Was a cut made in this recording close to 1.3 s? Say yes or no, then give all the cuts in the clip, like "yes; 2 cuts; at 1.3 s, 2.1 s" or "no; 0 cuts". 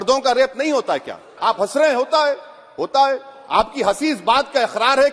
yes; 1 cut; at 1.3 s